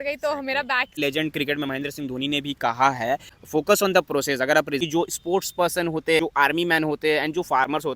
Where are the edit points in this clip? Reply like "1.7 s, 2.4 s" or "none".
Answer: 1.0 s, 3.3 s, 4.8 s, 6.2 s